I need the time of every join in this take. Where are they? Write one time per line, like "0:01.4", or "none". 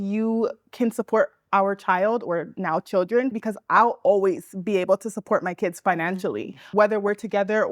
0:03.3
0:06.6

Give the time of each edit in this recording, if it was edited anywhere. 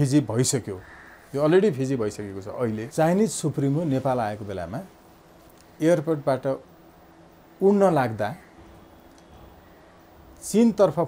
0:02.8

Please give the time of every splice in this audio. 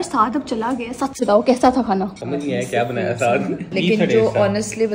0:02.2
0:03.7

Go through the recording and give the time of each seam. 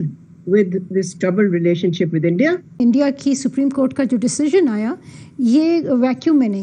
0:02.8

